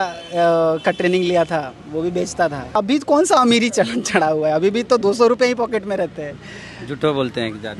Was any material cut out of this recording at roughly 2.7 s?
yes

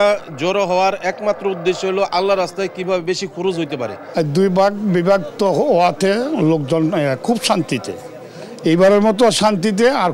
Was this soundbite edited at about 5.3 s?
no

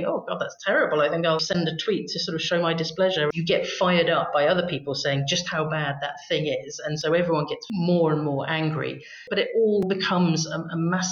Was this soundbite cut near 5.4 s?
no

